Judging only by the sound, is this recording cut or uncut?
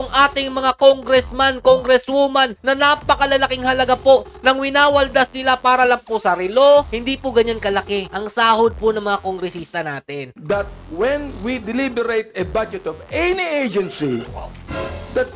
cut